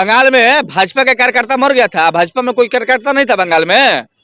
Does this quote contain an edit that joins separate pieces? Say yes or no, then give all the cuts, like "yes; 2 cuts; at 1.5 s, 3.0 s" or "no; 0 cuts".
no; 0 cuts